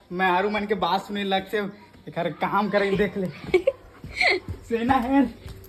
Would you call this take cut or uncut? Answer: uncut